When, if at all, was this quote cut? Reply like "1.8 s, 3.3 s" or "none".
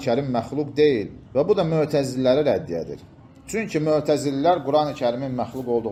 none